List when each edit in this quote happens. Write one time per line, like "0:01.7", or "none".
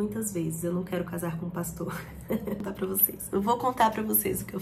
0:02.6